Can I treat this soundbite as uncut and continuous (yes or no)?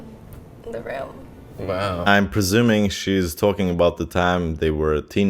no